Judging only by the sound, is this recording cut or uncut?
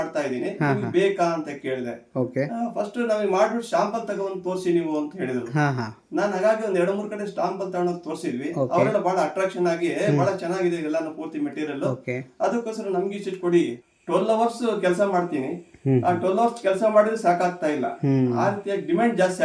cut